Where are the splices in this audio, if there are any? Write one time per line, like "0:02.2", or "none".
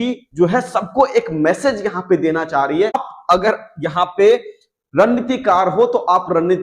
0:03.1